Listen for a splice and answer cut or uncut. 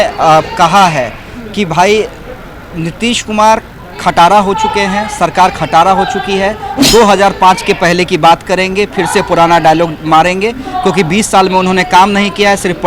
uncut